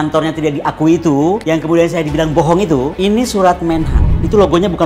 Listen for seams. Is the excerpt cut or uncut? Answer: uncut